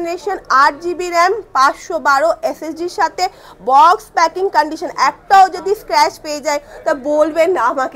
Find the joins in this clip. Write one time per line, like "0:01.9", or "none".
none